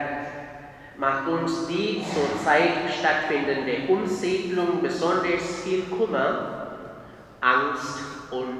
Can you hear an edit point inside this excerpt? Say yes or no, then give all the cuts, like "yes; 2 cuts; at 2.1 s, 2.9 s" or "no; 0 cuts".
no; 0 cuts